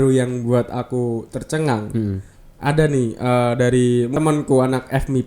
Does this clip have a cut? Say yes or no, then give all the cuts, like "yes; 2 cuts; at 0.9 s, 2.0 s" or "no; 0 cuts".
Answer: yes; 1 cut; at 4.1 s